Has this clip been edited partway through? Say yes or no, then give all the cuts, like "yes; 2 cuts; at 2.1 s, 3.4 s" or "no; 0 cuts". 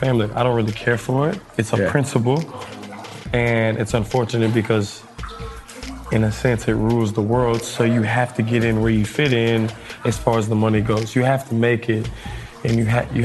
no; 0 cuts